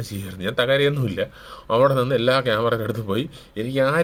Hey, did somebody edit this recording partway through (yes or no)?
no